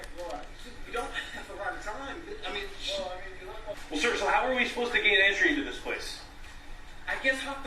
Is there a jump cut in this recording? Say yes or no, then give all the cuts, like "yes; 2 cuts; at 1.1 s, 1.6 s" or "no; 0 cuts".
yes; 1 cut; at 3.8 s